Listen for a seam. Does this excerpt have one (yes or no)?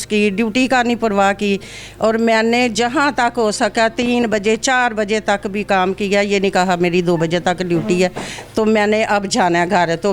no